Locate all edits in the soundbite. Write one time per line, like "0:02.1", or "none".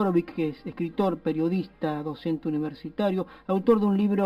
0:01.1